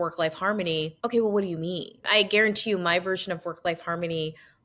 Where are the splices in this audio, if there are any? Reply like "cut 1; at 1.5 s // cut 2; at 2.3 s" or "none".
cut 1; at 1.0 s // cut 2; at 2.1 s